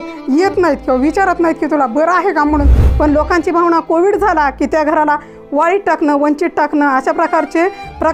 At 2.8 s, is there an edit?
yes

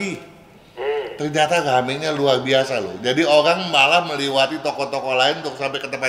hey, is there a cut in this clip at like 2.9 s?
no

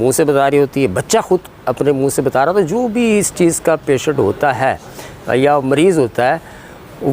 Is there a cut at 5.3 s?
no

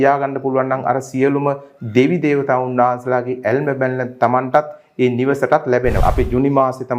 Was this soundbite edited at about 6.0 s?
yes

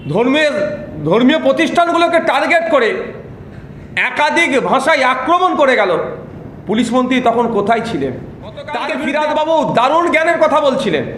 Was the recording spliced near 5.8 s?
no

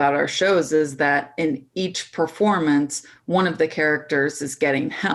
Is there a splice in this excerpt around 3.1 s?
no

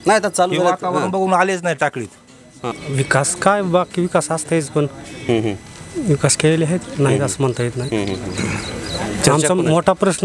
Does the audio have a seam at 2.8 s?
yes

